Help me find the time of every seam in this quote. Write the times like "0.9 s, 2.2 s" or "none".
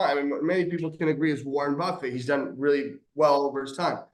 none